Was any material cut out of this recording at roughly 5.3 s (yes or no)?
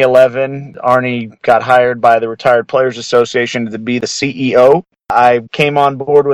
yes